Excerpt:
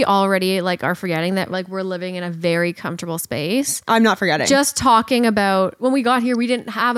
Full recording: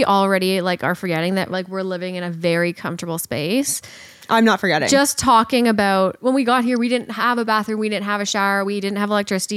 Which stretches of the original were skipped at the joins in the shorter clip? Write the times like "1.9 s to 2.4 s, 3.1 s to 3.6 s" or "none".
3.8 s to 4.2 s